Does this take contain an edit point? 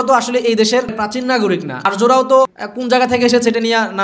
yes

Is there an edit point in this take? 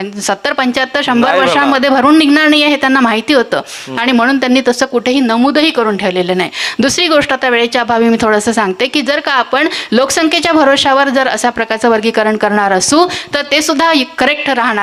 no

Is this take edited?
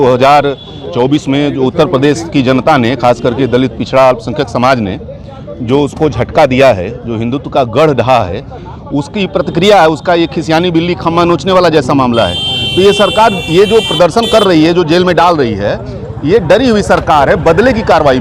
no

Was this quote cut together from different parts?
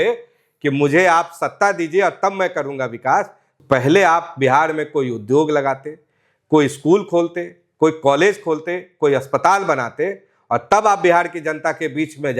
yes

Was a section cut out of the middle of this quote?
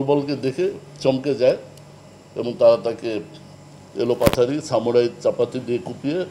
no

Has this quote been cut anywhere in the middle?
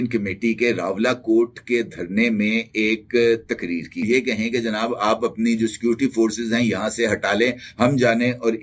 yes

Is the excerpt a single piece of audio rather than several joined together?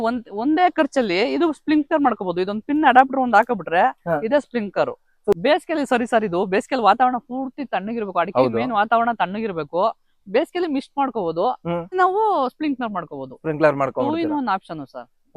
no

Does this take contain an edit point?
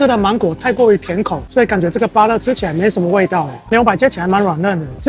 yes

